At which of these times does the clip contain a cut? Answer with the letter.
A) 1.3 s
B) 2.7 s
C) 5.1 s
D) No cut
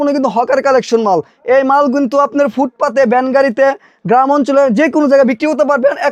D